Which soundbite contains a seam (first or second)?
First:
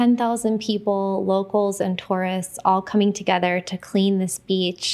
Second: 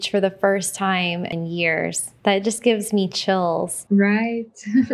second